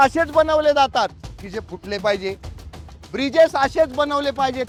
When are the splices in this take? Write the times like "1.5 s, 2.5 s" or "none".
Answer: none